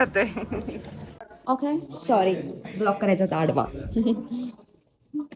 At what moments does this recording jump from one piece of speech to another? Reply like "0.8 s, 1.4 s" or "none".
1.3 s